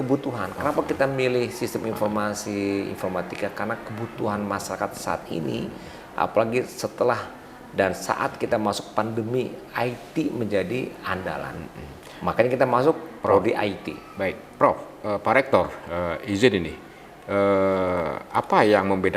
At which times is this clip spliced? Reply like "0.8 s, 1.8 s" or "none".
none

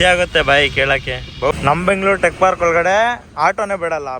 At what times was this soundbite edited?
1.5 s

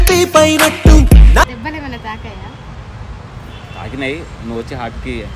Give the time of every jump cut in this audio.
1.5 s

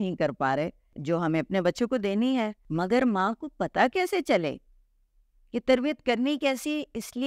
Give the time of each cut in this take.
1.0 s, 2.6 s

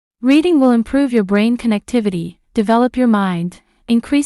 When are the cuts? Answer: 2.3 s

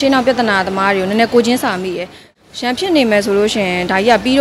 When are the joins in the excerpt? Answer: 2.3 s

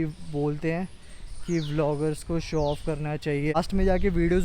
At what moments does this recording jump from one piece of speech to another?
3.5 s

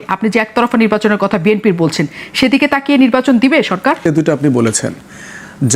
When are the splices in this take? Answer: 4.1 s

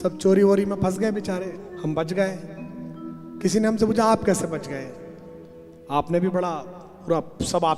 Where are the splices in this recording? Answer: 1.7 s

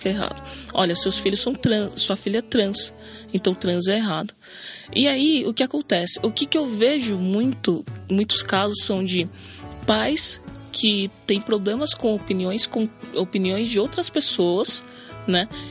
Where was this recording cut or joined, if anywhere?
none

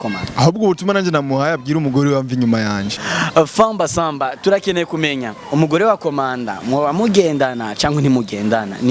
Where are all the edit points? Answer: 3.0 s

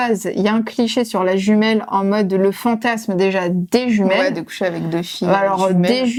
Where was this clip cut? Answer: none

